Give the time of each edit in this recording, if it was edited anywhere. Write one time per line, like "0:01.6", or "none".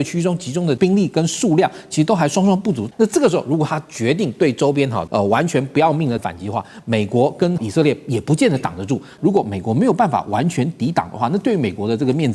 0:00.8
0:02.8
0:05.0
0:06.2
0:07.6
0:09.1